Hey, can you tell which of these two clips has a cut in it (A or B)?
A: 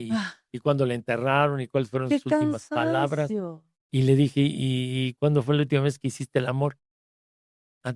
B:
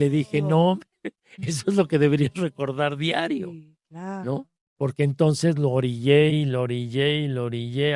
B